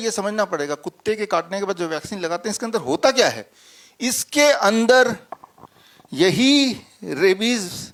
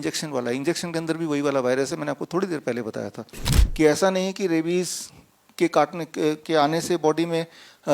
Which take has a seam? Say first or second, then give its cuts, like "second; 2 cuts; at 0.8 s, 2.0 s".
second; 1 cut; at 3.6 s